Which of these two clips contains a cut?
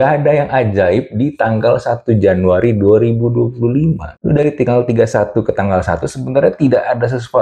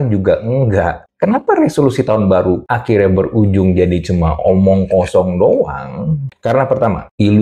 second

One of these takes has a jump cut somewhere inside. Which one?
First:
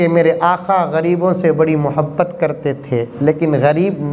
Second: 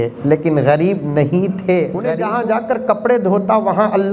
second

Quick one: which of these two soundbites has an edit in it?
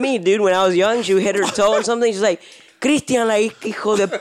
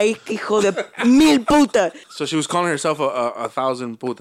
second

